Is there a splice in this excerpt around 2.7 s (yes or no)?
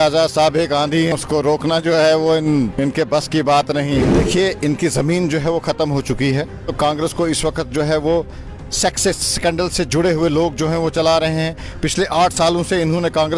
yes